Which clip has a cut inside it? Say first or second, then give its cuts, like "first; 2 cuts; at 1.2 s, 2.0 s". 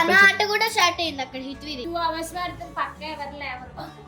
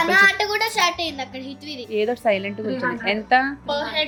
first; 1 cut; at 1.8 s